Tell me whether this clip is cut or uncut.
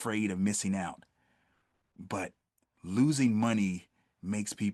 uncut